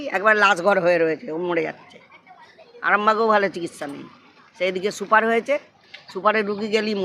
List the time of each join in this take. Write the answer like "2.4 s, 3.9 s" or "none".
none